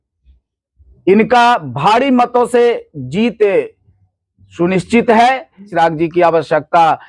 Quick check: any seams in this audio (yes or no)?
yes